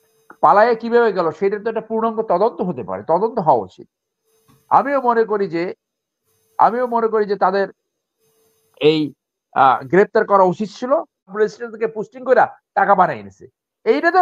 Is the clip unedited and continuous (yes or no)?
no